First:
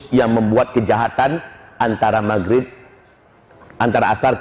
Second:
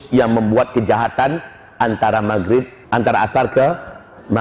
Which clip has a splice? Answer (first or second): second